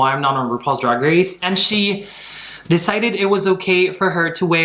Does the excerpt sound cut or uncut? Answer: cut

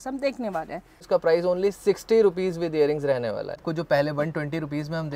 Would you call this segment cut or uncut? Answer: cut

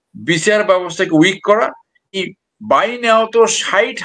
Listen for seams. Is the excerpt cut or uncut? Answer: cut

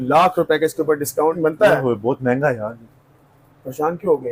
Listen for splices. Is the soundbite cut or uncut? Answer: cut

